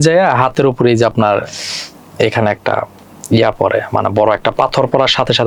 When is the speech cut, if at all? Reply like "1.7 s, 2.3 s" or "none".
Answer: none